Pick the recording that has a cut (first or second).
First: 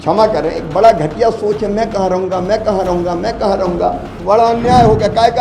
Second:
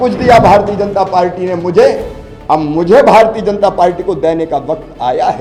first